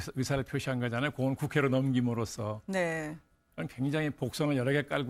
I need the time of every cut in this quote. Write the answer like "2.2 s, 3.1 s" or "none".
3.9 s